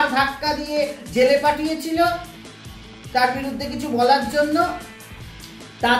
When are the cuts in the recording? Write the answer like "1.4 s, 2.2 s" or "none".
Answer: none

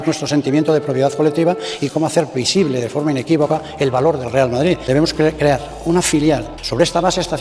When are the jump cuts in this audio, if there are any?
4.8 s, 6.5 s

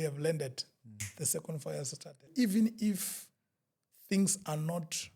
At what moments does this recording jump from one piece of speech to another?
2.3 s

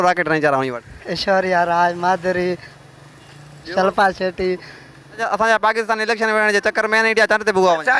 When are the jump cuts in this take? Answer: 5.1 s

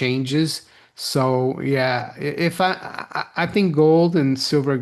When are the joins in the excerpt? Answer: none

